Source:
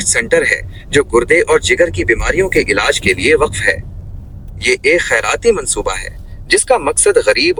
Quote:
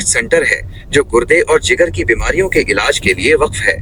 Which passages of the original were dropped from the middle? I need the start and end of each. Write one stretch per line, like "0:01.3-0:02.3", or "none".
none